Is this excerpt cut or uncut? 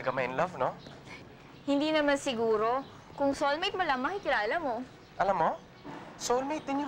uncut